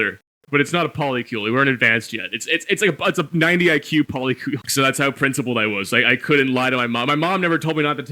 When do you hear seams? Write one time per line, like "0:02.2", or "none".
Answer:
0:04.6